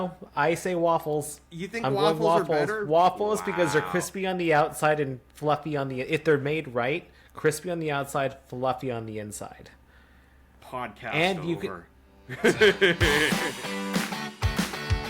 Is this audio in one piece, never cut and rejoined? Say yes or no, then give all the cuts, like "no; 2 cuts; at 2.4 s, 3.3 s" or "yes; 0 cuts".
no; 1 cut; at 13.3 s